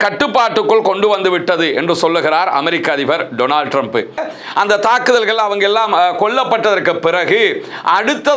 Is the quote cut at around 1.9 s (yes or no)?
no